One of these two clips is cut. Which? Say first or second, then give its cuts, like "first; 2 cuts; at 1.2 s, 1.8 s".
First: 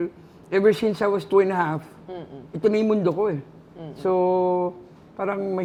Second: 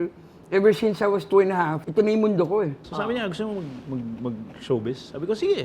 second; 2 cuts; at 1.8 s, 2.9 s